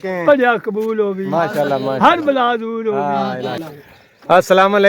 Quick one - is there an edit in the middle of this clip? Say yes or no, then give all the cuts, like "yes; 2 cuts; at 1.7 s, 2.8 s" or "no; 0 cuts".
yes; 1 cut; at 3.6 s